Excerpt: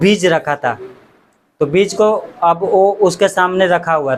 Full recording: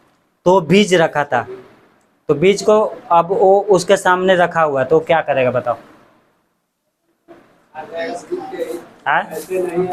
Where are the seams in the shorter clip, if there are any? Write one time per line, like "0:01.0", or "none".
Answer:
none